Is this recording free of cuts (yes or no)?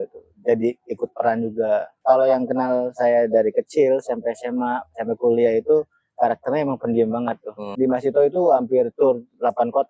no